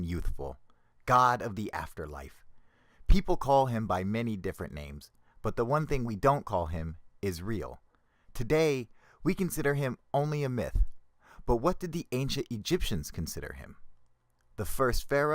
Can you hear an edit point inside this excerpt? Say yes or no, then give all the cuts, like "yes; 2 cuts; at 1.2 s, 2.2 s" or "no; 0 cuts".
yes; 1 cut; at 9.8 s